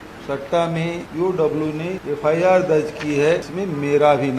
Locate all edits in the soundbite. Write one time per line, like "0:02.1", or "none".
0:01.0
0:02.0
0:03.5